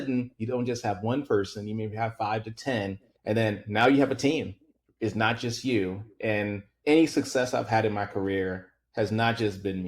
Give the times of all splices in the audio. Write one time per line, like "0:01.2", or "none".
0:03.1
0:06.7